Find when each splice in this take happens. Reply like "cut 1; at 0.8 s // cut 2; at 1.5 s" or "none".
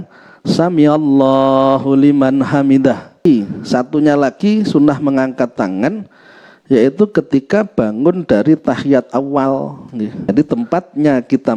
cut 1; at 3.2 s // cut 2; at 10.3 s